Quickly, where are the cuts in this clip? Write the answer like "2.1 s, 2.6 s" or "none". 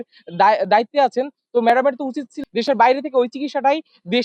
2.3 s